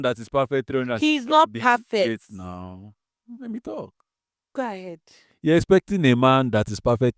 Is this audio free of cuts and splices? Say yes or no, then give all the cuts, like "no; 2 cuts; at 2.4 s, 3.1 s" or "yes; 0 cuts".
yes; 0 cuts